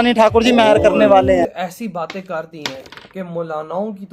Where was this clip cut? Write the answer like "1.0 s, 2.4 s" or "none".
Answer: 1.6 s